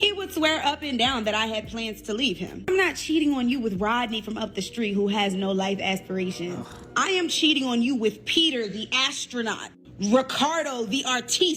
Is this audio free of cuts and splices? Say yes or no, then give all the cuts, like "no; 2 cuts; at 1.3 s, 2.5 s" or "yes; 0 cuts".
no; 1 cut; at 2.7 s